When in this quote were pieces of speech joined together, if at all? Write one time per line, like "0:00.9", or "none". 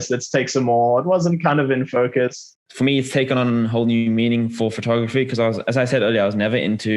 0:02.6